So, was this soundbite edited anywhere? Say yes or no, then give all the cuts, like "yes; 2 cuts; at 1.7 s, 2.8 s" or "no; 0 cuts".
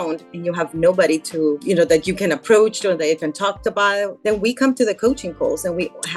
yes; 1 cut; at 4.1 s